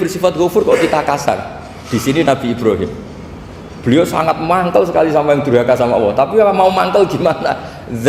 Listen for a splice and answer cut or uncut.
uncut